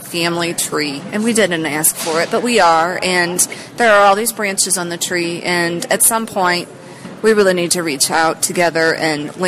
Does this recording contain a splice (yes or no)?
no